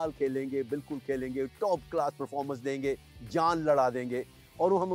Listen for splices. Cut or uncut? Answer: uncut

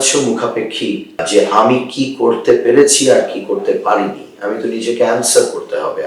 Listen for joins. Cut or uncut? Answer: cut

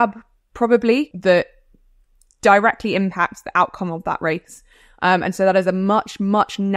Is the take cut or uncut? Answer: cut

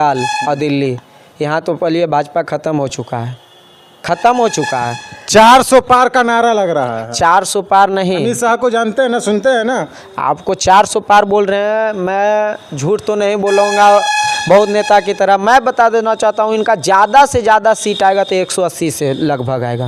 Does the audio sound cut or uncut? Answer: uncut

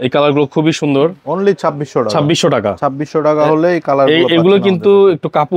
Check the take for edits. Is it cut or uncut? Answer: uncut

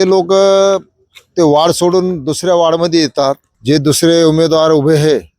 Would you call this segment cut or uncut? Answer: cut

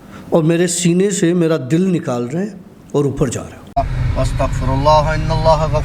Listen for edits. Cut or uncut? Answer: cut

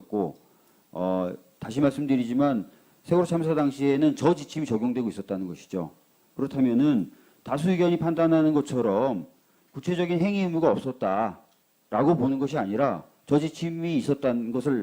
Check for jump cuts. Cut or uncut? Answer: cut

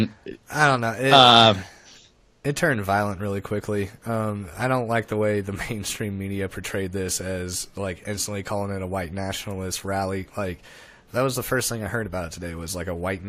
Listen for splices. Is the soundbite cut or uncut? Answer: uncut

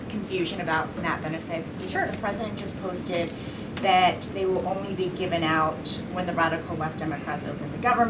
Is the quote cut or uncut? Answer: uncut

